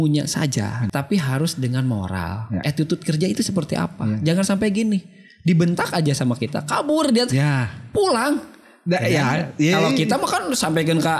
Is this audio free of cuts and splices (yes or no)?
no